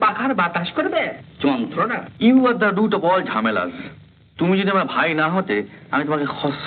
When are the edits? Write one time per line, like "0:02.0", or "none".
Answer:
0:02.0